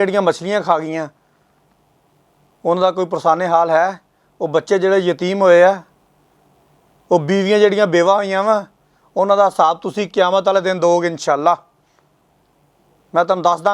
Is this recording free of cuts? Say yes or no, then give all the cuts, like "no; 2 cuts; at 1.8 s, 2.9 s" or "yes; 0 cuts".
yes; 0 cuts